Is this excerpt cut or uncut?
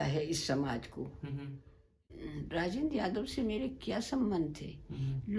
cut